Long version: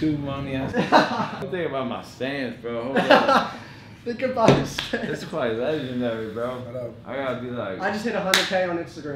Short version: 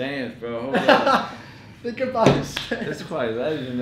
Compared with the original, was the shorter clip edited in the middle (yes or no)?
no